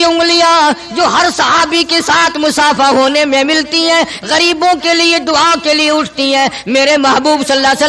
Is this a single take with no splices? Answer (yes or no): yes